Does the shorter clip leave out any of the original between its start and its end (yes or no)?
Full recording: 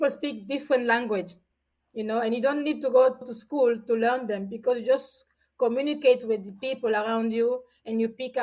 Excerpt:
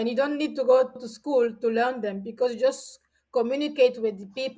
no